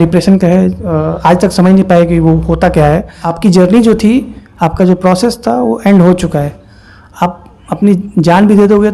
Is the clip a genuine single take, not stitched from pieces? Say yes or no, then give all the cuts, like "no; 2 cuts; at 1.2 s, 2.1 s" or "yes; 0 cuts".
no; 1 cut; at 3.2 s